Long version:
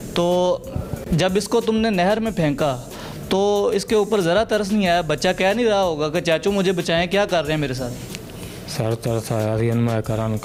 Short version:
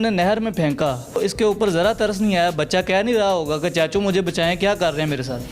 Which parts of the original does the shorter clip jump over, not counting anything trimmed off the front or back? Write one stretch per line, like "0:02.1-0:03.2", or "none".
0:03.0-0:03.7